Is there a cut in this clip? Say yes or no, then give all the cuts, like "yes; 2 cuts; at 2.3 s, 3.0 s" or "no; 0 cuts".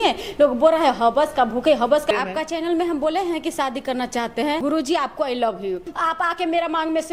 yes; 3 cuts; at 2.1 s, 4.6 s, 5.9 s